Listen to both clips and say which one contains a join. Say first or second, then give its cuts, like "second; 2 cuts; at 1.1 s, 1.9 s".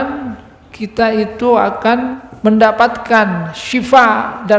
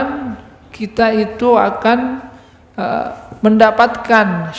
first; 1 cut; at 2.2 s